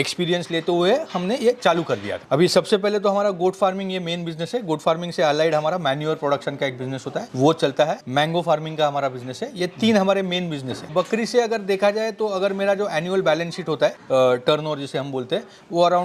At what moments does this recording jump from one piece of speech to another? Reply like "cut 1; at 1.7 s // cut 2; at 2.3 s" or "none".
cut 1; at 2.1 s // cut 2; at 10.9 s